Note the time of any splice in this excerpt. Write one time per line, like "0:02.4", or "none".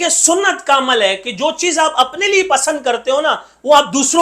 none